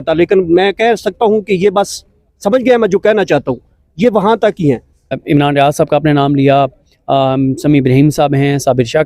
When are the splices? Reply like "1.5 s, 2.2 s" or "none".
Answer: 5.2 s